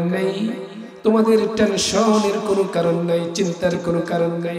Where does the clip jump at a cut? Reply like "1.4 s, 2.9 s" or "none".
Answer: none